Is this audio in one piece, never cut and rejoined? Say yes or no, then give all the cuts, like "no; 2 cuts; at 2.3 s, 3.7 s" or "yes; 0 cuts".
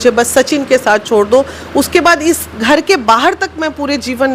yes; 0 cuts